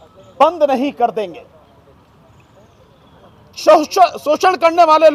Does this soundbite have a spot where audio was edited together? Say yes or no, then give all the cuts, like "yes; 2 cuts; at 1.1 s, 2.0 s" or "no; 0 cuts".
no; 0 cuts